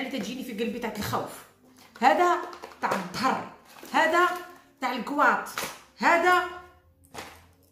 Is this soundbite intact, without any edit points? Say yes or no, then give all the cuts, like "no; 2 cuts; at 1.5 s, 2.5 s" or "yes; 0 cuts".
yes; 0 cuts